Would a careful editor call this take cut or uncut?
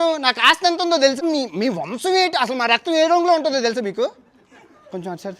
cut